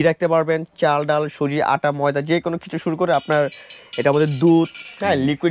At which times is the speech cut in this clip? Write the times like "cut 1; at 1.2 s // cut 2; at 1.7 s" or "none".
none